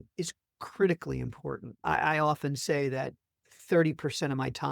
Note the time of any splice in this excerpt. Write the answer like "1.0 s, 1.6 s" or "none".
1.8 s